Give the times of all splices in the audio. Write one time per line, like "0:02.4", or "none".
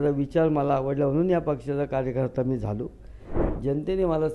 0:03.3